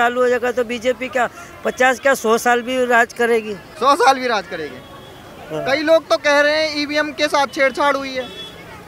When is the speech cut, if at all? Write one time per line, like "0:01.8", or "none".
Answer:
none